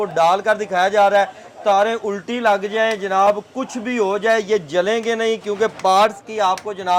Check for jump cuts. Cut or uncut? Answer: uncut